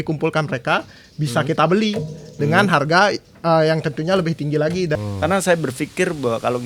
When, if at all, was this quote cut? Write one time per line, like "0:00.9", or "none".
0:05.0